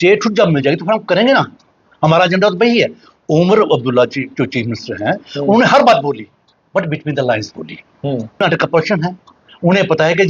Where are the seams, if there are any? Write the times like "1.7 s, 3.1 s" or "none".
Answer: 8.4 s